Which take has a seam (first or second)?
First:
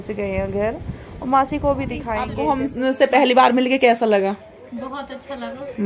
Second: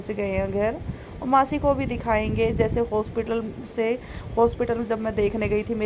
first